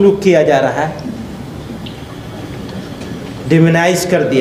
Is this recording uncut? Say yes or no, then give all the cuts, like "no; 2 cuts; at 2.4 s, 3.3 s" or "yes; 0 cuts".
yes; 0 cuts